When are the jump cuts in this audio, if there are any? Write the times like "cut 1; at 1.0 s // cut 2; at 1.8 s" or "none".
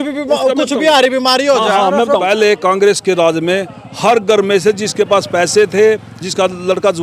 cut 1; at 2.2 s